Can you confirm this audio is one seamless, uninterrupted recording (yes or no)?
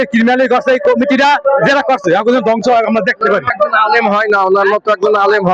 yes